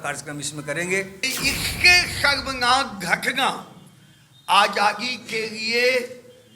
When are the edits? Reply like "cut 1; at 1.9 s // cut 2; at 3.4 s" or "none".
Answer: cut 1; at 1.3 s